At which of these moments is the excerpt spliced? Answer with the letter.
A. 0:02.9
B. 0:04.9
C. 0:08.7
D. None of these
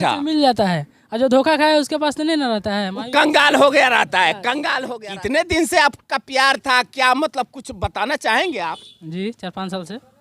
B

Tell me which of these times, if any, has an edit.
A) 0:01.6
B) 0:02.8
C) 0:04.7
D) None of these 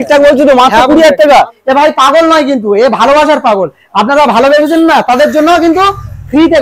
A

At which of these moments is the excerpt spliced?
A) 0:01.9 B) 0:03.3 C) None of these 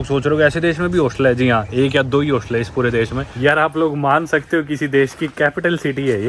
B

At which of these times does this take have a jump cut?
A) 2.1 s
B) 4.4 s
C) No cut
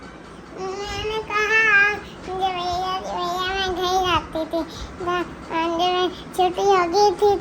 C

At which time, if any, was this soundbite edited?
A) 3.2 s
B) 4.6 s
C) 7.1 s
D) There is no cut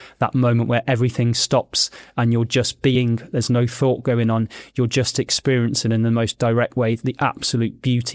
D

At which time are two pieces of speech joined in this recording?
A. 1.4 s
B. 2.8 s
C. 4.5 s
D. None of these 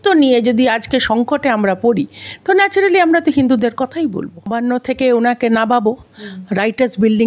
C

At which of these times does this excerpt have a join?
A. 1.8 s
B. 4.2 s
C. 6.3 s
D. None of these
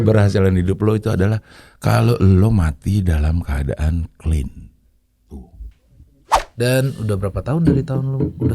C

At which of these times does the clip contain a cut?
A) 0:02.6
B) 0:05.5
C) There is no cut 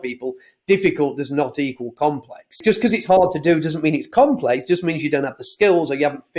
A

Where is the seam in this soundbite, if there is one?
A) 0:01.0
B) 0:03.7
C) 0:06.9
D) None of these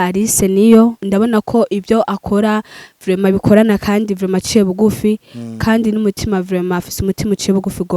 A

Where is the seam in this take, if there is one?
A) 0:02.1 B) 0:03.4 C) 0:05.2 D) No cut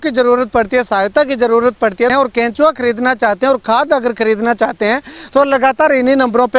A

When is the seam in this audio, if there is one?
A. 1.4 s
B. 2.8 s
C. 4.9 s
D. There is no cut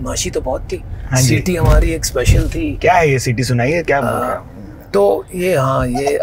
B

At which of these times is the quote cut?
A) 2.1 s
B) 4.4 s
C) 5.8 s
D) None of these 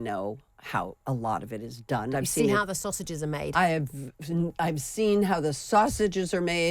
A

